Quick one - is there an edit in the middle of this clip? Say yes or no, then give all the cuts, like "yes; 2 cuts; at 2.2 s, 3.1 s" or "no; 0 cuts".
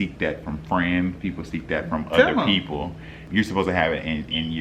yes; 1 cut; at 3.2 s